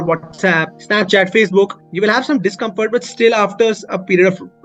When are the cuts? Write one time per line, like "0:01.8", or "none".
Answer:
none